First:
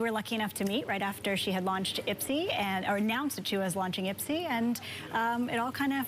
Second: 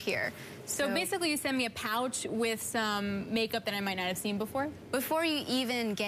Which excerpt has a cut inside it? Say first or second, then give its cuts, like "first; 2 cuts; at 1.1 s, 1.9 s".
first; 1 cut; at 2.0 s